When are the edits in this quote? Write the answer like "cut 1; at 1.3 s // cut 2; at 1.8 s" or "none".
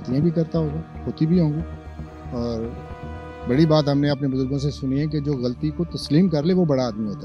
none